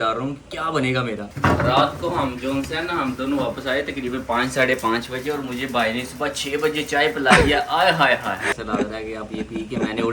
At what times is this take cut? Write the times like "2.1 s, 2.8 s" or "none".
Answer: 1.3 s, 8.5 s